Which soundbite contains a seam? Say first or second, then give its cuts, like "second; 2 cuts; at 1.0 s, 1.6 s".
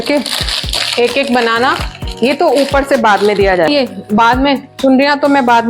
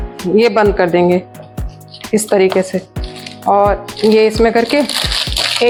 first; 1 cut; at 3.7 s